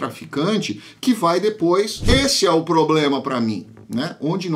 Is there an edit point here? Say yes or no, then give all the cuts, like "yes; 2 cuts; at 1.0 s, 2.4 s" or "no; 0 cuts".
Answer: yes; 1 cut; at 2.0 s